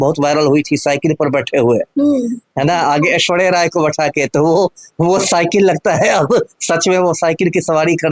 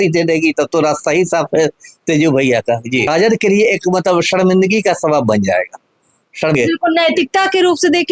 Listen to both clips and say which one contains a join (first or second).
second